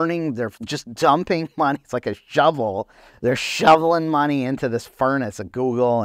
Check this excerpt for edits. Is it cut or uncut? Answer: uncut